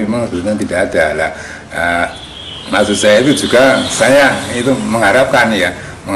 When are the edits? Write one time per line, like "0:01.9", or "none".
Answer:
none